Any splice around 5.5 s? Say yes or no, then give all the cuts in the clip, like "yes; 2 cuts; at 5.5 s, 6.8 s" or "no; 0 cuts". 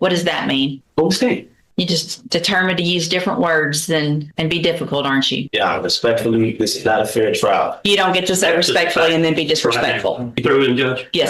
yes; 5 cuts; at 0.8 s, 1.6 s, 4.3 s, 5.5 s, 10.4 s